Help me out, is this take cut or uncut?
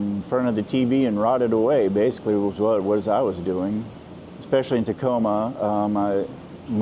uncut